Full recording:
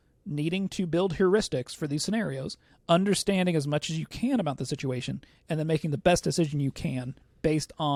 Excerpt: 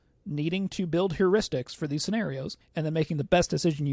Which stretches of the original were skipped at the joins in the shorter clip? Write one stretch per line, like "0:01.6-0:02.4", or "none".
0:02.6-0:05.3